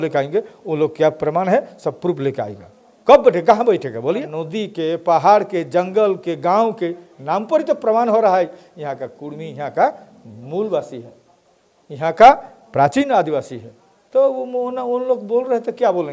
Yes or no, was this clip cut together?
yes